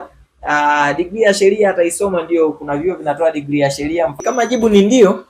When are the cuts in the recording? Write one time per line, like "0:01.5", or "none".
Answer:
0:04.2